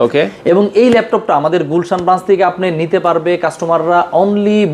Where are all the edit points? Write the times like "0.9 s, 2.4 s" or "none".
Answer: none